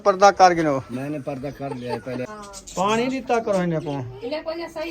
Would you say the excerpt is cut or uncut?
cut